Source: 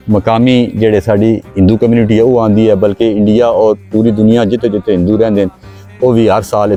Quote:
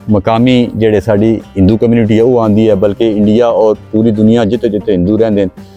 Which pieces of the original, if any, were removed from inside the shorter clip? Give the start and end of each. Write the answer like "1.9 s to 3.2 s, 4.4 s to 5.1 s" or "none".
none